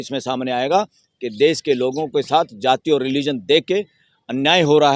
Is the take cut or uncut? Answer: uncut